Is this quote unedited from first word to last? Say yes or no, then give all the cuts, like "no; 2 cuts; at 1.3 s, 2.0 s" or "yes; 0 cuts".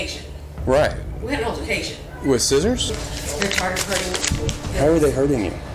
no; 1 cut; at 2.9 s